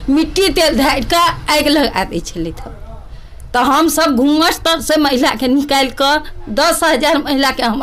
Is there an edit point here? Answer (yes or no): no